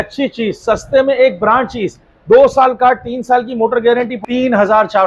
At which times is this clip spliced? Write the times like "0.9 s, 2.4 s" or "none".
4.1 s